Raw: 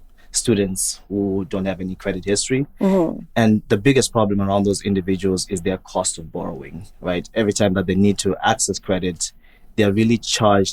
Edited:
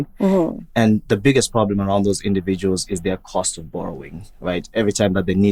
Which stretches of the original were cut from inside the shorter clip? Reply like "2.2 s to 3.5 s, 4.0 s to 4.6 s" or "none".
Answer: none